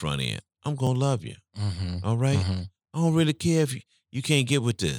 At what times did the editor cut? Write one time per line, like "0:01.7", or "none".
none